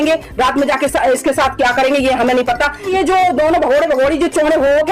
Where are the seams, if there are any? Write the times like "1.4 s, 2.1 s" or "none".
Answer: 2.9 s